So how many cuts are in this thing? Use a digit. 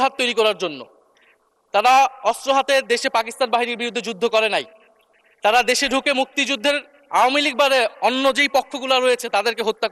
0